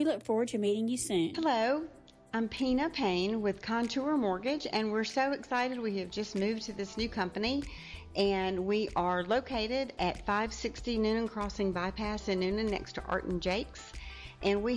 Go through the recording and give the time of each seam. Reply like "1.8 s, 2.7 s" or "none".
1.3 s